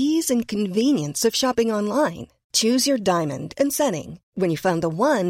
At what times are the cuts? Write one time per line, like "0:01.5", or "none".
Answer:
none